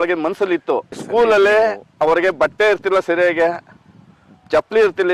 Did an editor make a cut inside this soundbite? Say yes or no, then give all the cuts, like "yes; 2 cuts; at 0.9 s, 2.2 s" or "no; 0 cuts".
yes; 1 cut; at 1.0 s